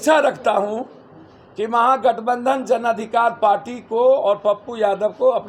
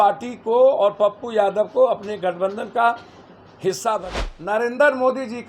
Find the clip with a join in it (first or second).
second